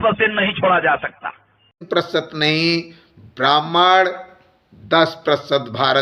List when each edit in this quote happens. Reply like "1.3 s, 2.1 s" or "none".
1.8 s